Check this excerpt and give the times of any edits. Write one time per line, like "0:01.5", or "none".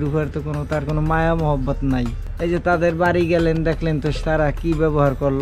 none